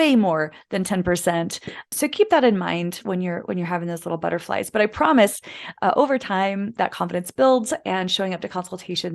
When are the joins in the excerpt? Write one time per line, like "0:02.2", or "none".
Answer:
0:01.9